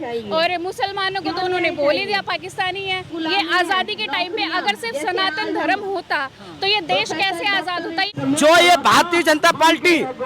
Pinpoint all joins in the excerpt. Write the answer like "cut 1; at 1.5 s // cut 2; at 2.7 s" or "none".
cut 1; at 3.1 s // cut 2; at 8.1 s